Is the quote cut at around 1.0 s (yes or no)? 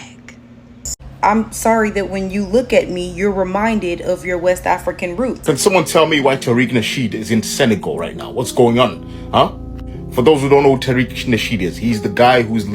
yes